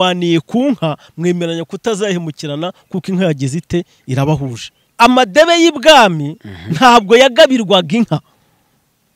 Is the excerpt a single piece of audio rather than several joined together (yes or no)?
no